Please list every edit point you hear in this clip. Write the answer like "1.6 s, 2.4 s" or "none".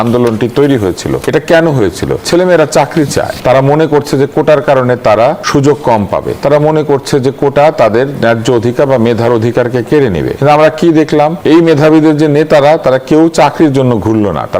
1.2 s, 2.2 s, 3.3 s, 5.4 s, 6.3 s, 10.3 s, 11.4 s